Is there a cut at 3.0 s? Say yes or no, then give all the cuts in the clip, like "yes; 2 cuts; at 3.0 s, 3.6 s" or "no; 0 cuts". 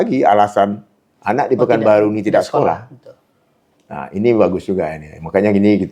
no; 0 cuts